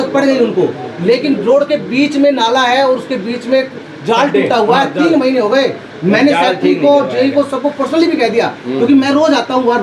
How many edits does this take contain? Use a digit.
0